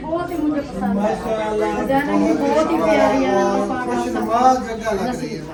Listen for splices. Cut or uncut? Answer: uncut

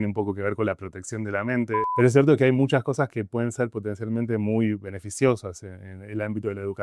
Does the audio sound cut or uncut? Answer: cut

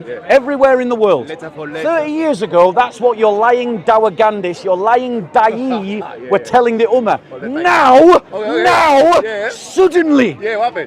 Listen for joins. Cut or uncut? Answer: uncut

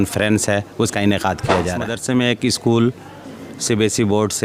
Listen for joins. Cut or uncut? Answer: cut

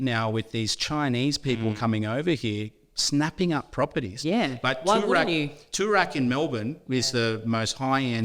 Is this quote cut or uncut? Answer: uncut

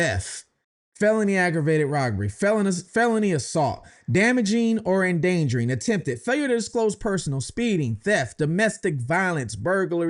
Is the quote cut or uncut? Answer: uncut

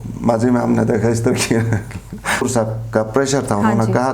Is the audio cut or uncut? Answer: cut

